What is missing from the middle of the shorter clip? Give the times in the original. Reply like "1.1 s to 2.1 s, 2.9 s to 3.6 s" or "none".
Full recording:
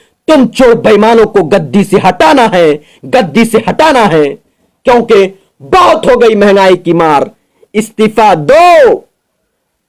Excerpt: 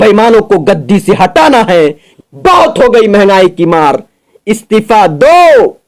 3.0 s to 5.4 s

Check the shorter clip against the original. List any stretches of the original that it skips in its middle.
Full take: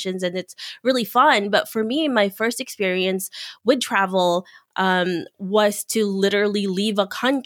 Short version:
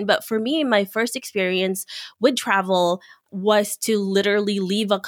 4.6 s to 5.3 s

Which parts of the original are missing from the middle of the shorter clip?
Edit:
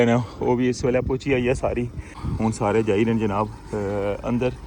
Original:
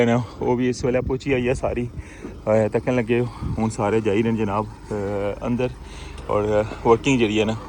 2.2 s to 3.4 s

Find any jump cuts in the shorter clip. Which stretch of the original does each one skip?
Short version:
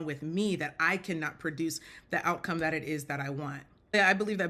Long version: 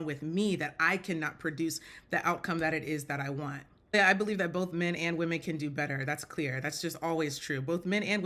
none

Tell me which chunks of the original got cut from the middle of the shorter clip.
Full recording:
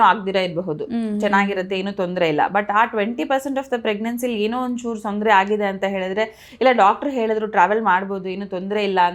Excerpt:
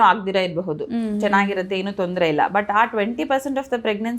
none

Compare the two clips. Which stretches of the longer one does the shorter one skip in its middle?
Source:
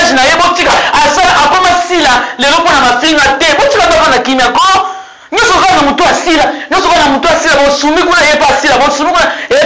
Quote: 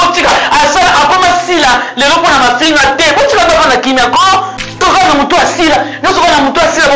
5.2 s to 5.5 s

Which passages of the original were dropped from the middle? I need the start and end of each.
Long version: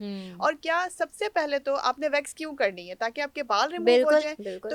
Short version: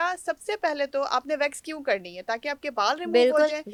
none

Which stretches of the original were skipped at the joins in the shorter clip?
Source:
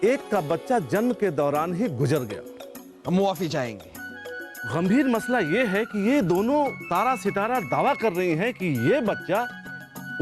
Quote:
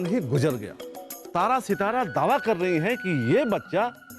2.9 s to 6.8 s

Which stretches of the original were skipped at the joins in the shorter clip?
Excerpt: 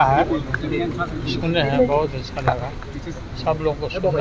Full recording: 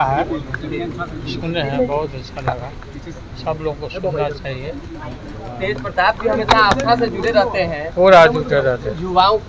none

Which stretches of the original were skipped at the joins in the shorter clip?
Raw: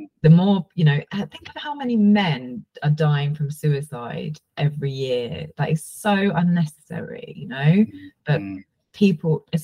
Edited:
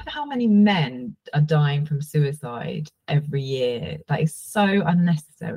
none

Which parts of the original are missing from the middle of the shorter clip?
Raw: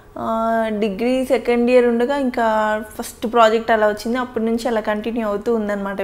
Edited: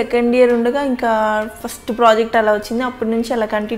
none

